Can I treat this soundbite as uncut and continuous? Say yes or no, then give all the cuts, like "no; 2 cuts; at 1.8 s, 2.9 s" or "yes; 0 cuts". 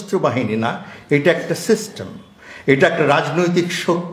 yes; 0 cuts